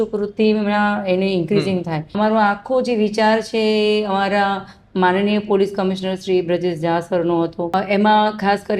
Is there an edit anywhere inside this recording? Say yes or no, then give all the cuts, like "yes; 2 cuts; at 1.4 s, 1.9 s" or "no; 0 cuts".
yes; 2 cuts; at 2.1 s, 7.7 s